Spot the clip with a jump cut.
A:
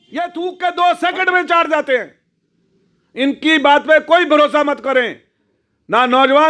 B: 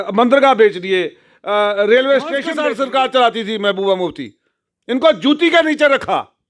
B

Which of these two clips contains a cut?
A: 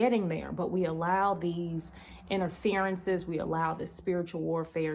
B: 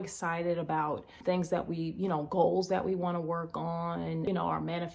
B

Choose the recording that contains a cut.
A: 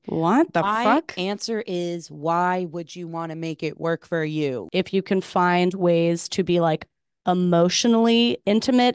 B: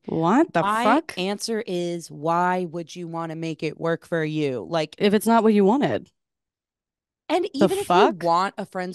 A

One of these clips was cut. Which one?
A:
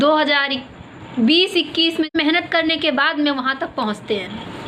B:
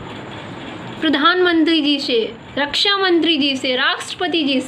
A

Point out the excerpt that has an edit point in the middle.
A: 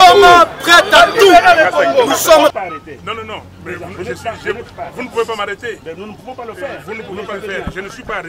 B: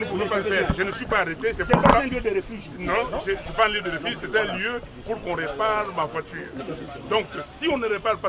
A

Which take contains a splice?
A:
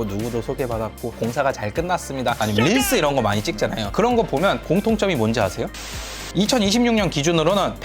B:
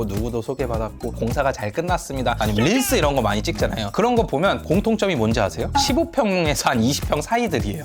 A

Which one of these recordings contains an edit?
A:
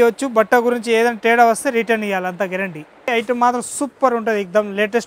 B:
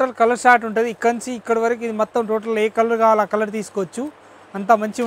A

